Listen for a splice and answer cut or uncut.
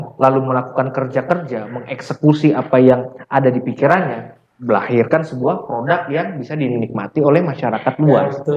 uncut